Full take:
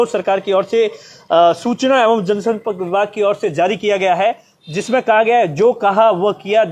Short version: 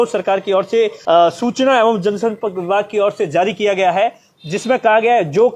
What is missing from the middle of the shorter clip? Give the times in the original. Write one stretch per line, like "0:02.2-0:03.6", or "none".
0:01.0-0:01.2